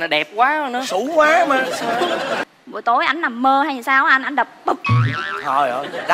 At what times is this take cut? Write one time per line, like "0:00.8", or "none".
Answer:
0:02.4